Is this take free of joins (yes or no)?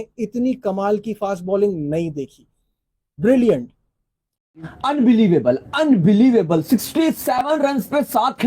no